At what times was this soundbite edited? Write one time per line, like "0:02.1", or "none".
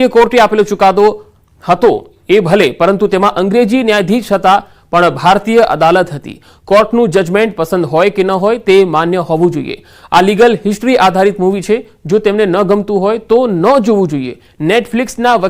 0:03.5